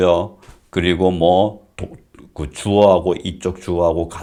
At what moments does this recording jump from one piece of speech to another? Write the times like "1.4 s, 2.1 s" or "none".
none